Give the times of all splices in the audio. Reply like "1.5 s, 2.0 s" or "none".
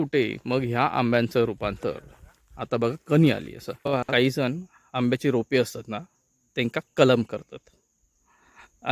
4.0 s